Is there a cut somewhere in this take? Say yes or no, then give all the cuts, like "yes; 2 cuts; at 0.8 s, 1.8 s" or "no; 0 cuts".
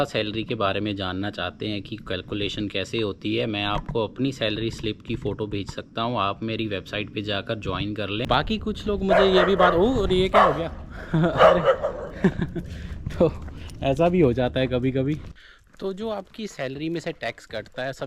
yes; 2 cuts; at 8.2 s, 15.2 s